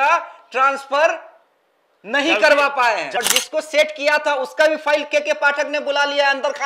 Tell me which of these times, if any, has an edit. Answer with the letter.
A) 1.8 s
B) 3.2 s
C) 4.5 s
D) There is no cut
B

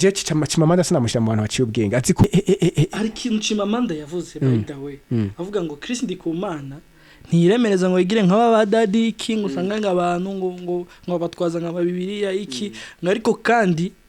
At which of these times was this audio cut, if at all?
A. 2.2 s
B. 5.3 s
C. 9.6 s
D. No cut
A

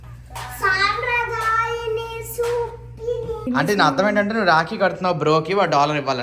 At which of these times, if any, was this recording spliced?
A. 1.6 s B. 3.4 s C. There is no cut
B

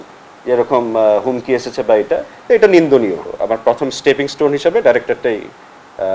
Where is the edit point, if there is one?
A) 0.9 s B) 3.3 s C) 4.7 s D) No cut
B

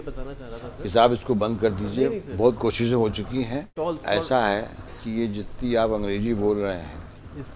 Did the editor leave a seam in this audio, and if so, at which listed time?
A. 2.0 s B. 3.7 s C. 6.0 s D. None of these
B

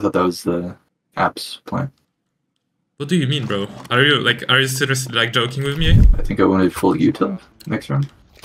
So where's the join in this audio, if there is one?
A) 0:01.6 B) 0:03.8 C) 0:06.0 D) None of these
C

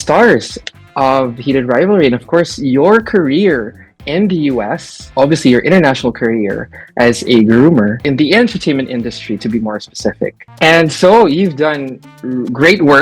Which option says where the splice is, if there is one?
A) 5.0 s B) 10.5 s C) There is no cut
B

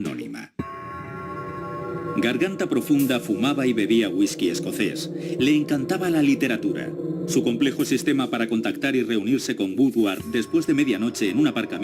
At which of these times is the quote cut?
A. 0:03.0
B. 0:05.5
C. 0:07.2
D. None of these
A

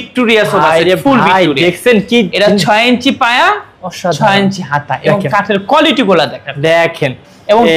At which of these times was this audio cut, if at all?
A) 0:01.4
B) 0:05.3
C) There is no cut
C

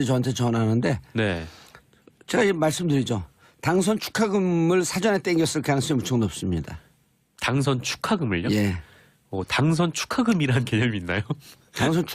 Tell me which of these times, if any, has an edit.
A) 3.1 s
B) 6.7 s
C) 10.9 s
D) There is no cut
B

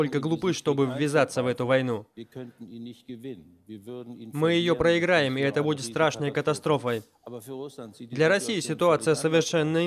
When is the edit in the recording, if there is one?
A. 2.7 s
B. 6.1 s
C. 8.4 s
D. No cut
D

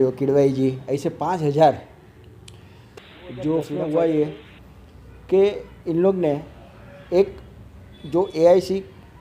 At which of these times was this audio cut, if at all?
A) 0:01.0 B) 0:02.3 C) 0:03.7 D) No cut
C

